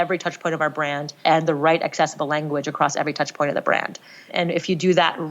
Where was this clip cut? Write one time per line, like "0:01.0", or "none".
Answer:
0:01.1
0:04.3